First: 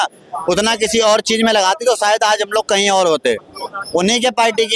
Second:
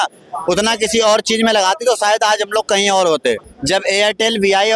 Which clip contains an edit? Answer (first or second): second